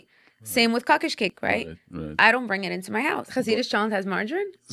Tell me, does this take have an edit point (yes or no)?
yes